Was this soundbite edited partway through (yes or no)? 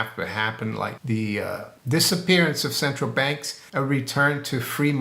yes